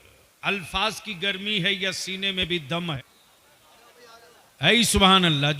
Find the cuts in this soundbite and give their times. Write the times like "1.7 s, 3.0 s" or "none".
3.0 s